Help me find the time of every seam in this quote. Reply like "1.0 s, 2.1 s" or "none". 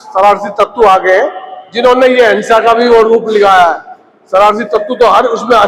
none